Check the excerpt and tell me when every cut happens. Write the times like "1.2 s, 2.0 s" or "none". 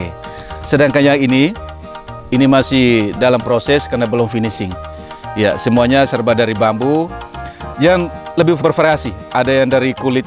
8.6 s